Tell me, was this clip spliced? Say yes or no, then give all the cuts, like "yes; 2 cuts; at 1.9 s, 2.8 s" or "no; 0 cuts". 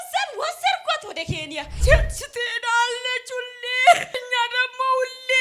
yes; 2 cuts; at 1.7 s, 4.2 s